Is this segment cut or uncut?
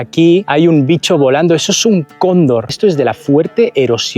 cut